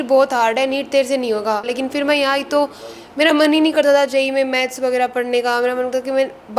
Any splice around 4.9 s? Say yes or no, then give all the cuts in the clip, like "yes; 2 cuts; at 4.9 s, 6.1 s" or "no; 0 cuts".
no; 1 cut; at 1.7 s